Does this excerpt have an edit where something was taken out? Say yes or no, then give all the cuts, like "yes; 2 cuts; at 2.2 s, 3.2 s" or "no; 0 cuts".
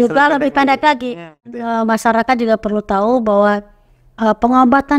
yes; 1 cut; at 1.3 s